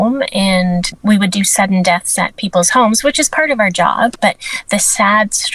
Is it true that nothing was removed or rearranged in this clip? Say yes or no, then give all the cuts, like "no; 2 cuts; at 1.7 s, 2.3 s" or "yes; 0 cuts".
no; 2 cuts; at 0.9 s, 4.2 s